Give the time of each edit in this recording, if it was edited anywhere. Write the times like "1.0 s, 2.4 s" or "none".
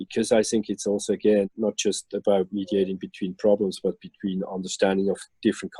none